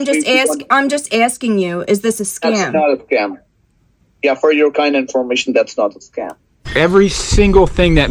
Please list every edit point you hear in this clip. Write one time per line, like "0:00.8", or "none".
0:06.6